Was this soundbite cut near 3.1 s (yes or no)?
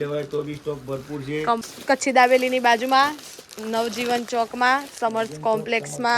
no